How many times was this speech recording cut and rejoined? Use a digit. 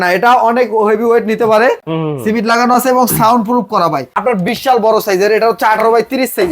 2